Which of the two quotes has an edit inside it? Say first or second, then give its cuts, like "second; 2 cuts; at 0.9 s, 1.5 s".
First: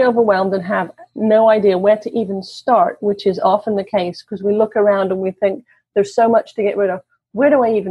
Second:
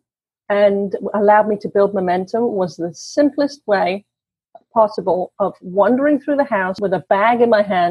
second; 1 cut; at 6.8 s